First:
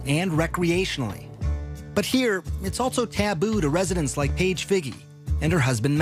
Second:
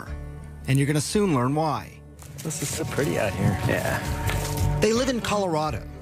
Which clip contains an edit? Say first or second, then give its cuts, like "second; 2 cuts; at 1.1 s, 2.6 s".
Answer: second; 1 cut; at 1.3 s